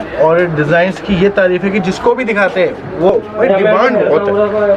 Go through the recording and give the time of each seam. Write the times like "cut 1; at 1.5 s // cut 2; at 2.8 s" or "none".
cut 1; at 3.1 s